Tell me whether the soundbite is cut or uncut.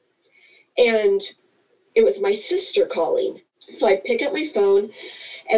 cut